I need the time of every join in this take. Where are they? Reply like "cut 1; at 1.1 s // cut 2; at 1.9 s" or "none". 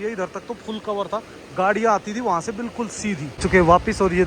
cut 1; at 3.3 s